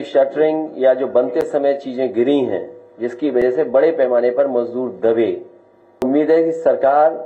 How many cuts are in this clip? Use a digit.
1